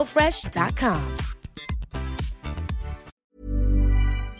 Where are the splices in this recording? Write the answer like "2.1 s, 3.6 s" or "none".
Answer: 3.1 s